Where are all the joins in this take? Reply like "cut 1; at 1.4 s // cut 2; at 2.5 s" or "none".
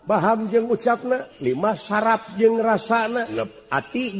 cut 1; at 1.3 s // cut 2; at 3.3 s